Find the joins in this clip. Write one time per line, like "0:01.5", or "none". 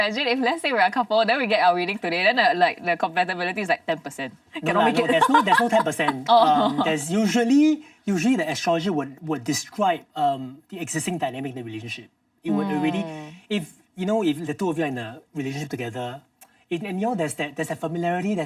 none